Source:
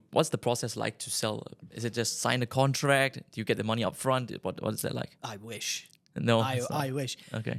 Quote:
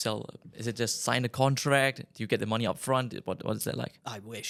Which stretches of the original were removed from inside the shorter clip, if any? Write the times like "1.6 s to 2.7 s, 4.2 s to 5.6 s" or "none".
none